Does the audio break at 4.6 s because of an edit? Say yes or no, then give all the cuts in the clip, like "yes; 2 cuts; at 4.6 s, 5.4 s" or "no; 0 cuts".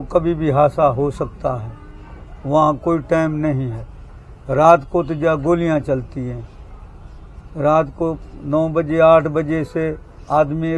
no; 0 cuts